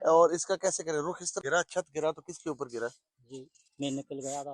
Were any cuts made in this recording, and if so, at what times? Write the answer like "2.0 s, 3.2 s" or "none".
1.3 s